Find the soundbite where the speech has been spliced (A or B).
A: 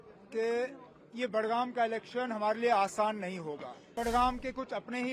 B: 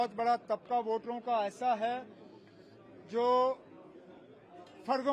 A